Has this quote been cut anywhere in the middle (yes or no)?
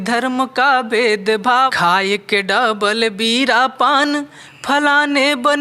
yes